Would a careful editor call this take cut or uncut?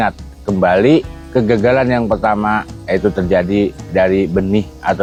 uncut